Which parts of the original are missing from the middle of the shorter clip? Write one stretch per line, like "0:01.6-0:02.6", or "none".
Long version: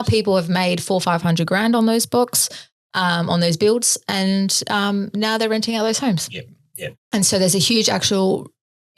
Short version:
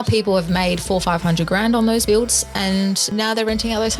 0:02.0-0:03.6
0:04.6-0:05.1